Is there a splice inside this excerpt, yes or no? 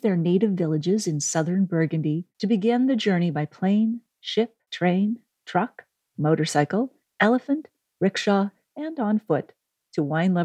yes